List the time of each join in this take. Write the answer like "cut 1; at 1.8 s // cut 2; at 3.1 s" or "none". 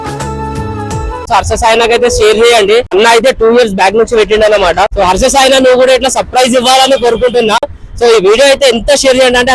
cut 1; at 1.3 s // cut 2; at 2.9 s // cut 3; at 4.9 s